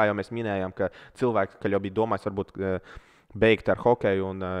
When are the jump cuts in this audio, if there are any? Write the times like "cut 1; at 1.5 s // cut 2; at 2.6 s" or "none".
cut 1; at 1.6 s